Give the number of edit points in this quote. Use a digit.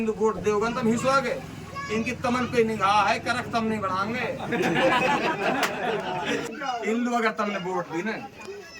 1